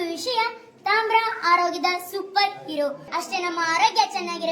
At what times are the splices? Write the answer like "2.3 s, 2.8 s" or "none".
3.0 s